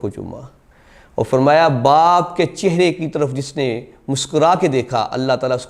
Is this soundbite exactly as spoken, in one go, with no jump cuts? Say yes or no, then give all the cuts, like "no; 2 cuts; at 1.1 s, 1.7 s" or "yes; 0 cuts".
yes; 0 cuts